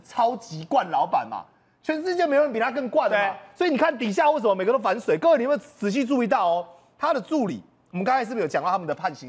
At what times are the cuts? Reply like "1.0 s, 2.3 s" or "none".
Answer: none